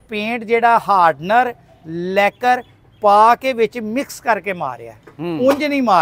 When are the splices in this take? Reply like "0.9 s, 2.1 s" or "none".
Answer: none